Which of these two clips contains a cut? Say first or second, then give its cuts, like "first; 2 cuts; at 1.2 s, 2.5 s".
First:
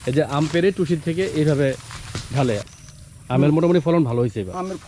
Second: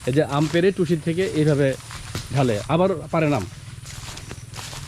first; 1 cut; at 2.6 s